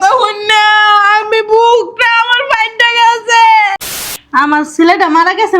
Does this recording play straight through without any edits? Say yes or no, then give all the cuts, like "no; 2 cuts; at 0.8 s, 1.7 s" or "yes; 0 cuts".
no; 1 cut; at 3.9 s